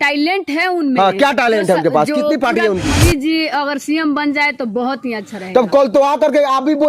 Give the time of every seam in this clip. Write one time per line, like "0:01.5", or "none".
0:02.9